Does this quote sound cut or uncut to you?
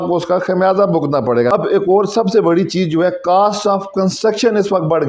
cut